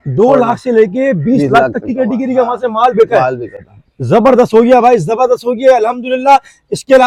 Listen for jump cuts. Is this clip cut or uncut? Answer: uncut